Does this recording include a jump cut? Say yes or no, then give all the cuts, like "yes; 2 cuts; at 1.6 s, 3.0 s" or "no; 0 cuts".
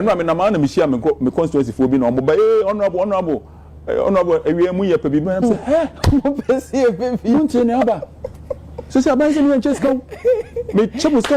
no; 0 cuts